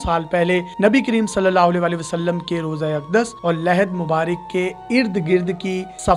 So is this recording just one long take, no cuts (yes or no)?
yes